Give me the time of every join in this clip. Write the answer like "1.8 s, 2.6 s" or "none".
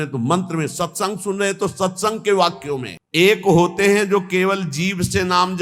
2.9 s